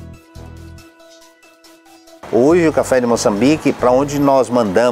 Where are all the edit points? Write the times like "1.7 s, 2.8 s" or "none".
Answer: 2.2 s